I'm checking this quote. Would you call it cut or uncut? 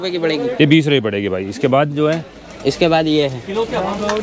uncut